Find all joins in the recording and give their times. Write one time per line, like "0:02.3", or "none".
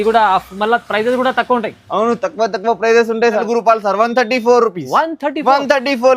0:03.4